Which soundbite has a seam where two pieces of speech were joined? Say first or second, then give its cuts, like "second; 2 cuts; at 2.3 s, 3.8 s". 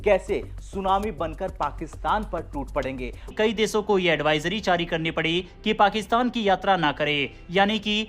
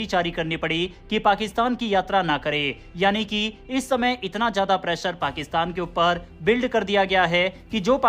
first; 1 cut; at 3.4 s